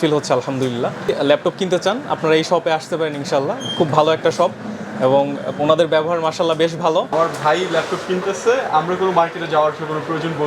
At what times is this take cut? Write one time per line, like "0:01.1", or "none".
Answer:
0:01.1
0:07.1